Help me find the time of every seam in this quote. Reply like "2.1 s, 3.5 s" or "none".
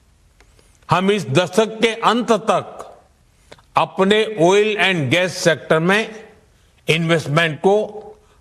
1.3 s